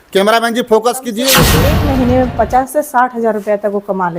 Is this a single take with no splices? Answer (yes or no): no